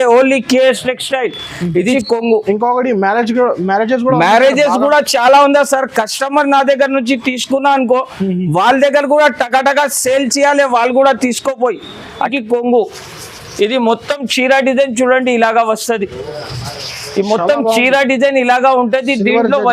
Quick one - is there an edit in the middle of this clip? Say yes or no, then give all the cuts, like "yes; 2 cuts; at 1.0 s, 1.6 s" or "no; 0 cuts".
yes; 2 cuts; at 1.9 s, 12.3 s